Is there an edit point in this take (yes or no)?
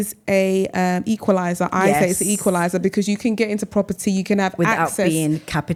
no